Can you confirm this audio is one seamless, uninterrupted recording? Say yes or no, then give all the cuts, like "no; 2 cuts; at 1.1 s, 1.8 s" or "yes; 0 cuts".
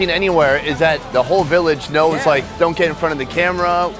no; 1 cut; at 1.0 s